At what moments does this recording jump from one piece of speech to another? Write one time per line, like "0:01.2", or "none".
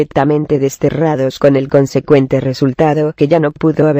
0:01.0